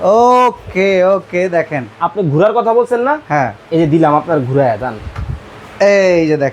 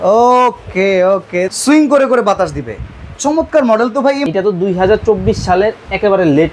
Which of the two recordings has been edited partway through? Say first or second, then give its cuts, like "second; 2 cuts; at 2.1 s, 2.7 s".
second; 2 cuts; at 1.5 s, 4.2 s